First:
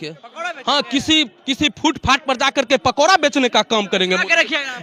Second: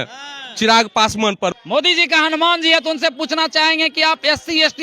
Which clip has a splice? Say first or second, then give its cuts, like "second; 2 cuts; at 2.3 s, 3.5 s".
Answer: second; 1 cut; at 1.5 s